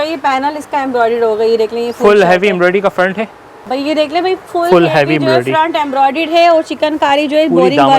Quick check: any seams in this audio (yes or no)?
yes